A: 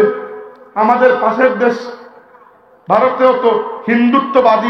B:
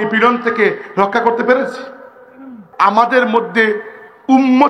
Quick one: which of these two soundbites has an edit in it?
B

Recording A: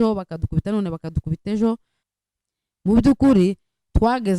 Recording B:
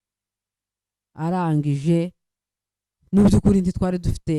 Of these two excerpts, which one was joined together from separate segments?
A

